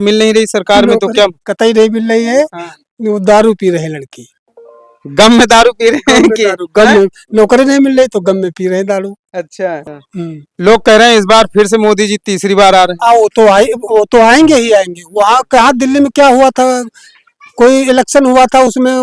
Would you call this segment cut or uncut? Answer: cut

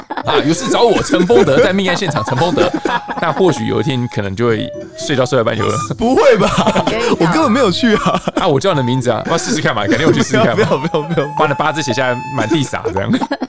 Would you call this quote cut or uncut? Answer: uncut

